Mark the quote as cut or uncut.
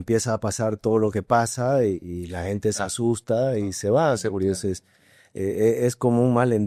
uncut